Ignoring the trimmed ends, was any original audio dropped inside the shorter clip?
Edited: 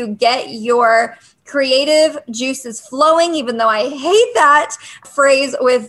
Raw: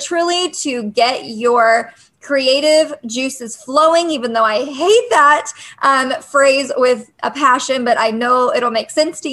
yes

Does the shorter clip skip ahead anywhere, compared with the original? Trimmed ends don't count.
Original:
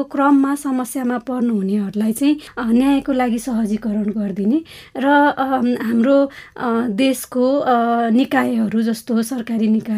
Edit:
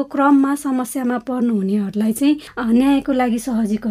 no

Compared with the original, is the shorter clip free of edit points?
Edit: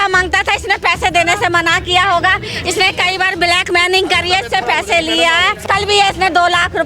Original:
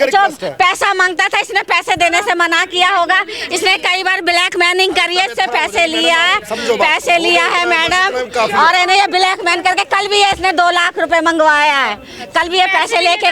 no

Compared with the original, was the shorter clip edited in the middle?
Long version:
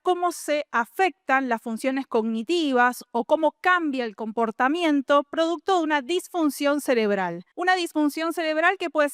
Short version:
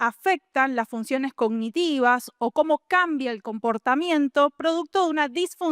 no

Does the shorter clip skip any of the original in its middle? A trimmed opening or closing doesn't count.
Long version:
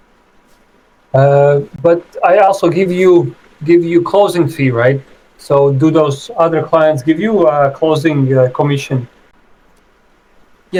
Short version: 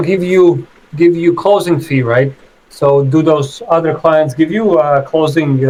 no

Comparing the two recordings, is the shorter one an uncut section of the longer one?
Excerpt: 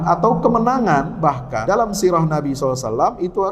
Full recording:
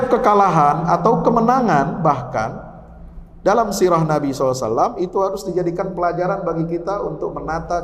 no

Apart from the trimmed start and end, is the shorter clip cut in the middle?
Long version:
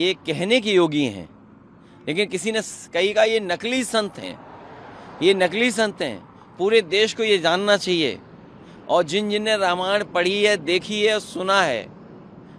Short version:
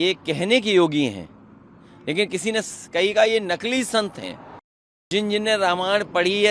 yes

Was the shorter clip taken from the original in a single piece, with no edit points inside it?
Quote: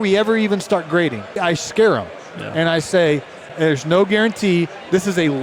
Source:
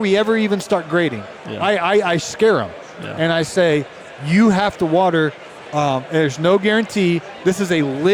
no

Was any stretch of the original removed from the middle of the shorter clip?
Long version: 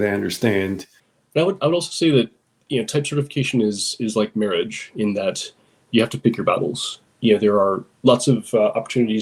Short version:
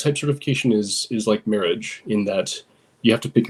no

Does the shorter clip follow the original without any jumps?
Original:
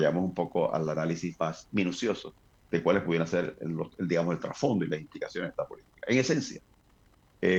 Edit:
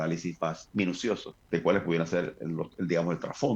no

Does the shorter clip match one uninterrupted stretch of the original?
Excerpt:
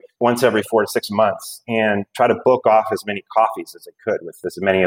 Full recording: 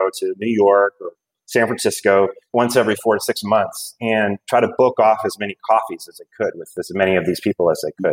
yes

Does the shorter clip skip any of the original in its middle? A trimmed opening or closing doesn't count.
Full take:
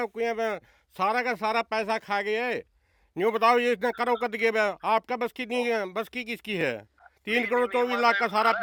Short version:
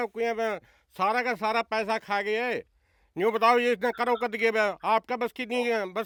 no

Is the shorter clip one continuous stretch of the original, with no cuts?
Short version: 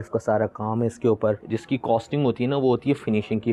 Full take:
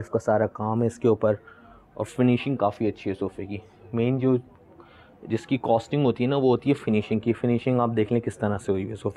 no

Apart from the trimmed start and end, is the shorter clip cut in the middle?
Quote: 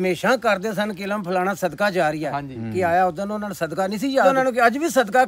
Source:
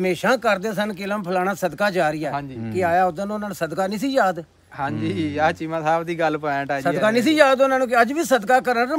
yes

